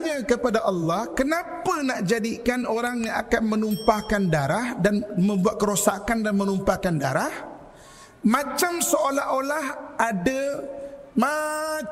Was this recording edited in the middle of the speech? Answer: no; 0 cuts

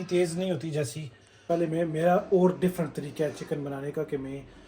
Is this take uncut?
no; 1 cut; at 1.4 s

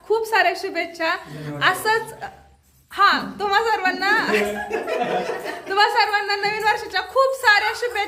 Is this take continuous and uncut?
yes; 0 cuts

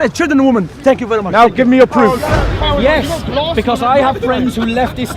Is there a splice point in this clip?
yes; 1 cut; at 2.3 s

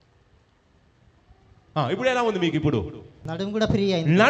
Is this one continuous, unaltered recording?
no; 1 cut; at 3.2 s

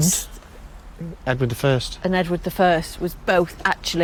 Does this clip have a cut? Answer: no; 0 cuts

